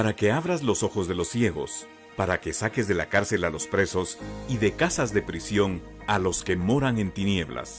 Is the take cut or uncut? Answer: cut